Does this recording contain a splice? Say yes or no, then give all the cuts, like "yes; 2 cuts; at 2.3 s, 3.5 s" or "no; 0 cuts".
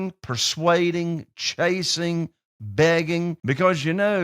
yes; 1 cut; at 3.4 s